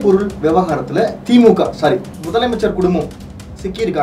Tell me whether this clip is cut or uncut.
cut